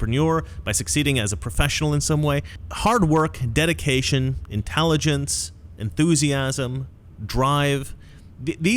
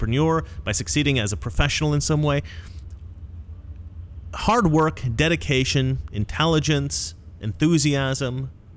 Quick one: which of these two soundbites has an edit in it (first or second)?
first